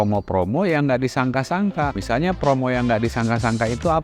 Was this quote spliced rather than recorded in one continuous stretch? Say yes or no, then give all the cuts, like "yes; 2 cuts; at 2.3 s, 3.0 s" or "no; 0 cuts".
no; 0 cuts